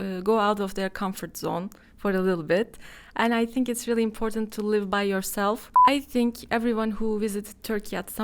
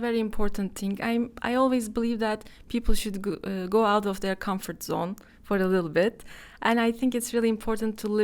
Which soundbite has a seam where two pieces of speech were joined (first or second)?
first